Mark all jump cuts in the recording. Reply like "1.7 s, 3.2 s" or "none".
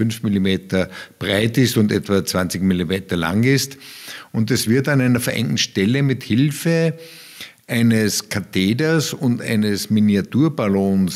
none